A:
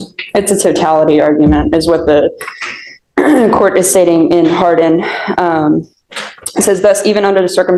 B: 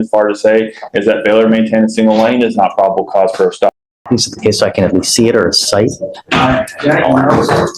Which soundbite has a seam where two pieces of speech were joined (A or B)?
B